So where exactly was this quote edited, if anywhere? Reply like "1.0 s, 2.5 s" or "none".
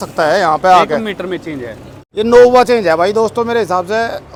none